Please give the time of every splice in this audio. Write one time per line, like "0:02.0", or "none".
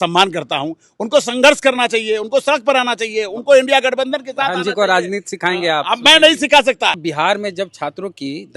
0:07.0